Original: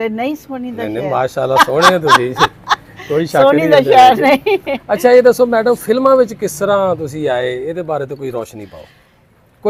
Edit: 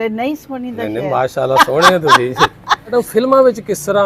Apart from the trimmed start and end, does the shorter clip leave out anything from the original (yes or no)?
yes